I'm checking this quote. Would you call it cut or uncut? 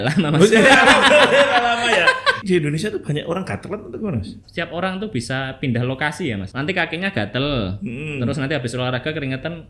cut